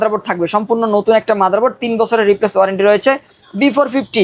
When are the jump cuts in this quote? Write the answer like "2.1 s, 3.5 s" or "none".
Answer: none